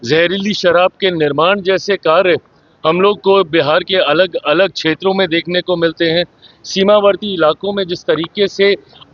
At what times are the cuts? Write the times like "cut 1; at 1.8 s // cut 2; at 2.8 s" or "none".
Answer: none